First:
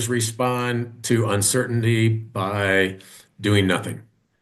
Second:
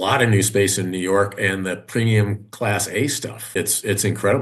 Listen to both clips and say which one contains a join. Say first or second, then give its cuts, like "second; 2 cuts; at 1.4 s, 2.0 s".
second; 1 cut; at 3.5 s